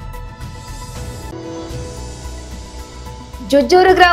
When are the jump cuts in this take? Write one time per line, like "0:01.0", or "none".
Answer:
0:01.2
0:02.6